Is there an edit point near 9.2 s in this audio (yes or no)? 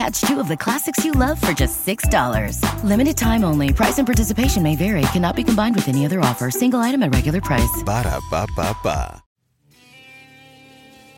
yes